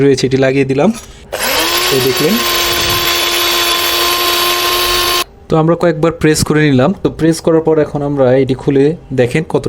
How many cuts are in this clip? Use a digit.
2